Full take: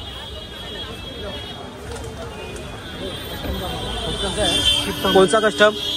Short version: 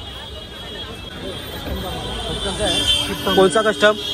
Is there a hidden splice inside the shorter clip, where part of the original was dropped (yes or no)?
yes